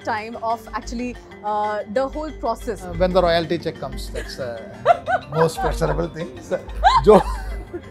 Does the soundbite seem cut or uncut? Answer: cut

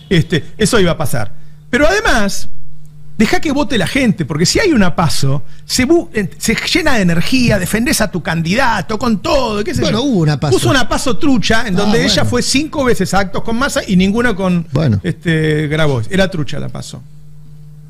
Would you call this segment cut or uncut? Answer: uncut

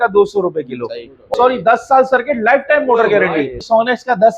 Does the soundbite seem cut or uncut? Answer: cut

